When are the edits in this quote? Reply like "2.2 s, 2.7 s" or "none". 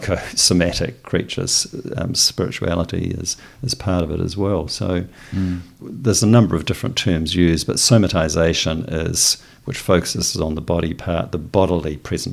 5.7 s